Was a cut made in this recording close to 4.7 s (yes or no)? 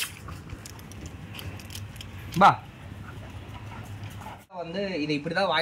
yes